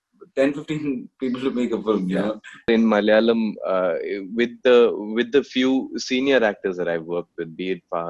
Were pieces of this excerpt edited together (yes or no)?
yes